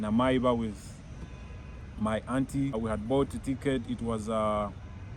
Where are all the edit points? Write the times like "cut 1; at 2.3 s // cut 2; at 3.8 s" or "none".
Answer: cut 1; at 2.8 s